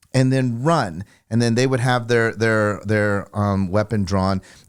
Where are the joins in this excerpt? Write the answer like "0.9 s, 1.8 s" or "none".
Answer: none